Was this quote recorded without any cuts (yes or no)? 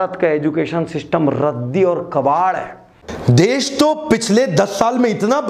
no